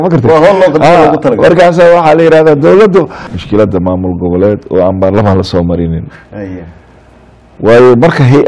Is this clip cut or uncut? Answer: cut